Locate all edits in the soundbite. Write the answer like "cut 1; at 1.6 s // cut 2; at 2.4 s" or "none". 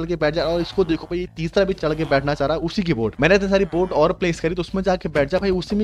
cut 1; at 1.8 s // cut 2; at 3.1 s